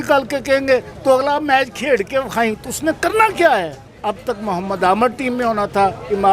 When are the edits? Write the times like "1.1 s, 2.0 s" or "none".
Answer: 3.9 s